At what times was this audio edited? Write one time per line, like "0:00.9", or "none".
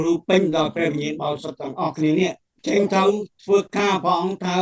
0:02.5